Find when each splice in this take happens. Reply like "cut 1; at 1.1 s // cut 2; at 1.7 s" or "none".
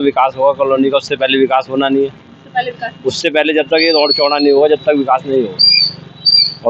none